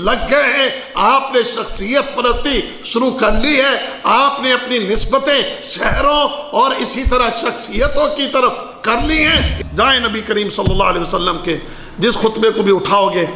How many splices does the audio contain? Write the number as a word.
one